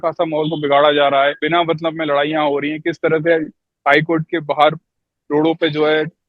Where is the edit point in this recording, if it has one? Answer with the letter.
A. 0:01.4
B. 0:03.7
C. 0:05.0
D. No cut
A